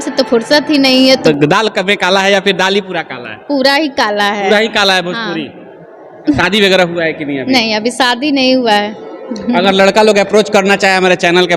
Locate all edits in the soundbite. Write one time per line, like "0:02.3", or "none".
0:01.2
0:06.4